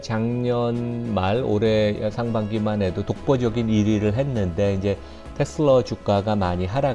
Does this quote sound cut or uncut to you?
uncut